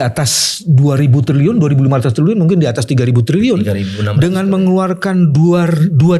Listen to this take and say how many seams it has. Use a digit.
0